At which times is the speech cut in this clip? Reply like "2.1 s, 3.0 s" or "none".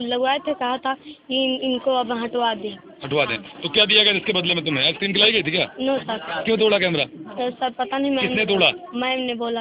none